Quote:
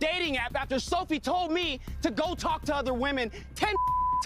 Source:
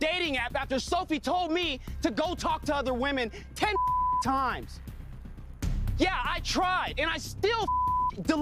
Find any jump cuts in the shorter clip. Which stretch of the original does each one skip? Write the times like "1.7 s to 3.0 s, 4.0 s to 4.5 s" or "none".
none